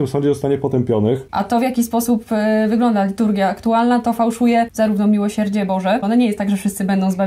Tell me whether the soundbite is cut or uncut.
cut